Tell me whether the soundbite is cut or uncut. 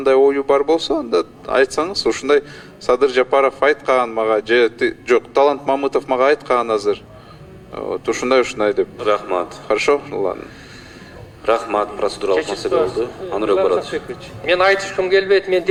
uncut